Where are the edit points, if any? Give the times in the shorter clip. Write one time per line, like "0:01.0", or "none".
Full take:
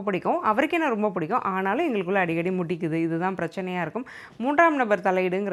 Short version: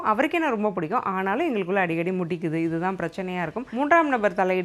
0:03.6